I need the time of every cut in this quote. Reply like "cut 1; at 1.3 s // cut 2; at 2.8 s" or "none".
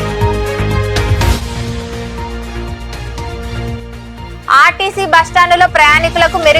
cut 1; at 1.1 s